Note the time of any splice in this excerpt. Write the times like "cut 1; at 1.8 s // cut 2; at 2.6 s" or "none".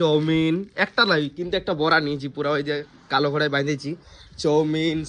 none